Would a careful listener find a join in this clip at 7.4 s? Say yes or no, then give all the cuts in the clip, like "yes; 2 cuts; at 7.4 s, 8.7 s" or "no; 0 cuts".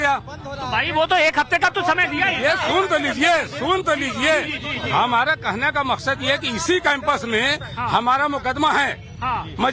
no; 0 cuts